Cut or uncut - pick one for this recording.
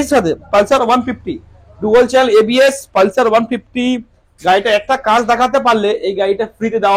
uncut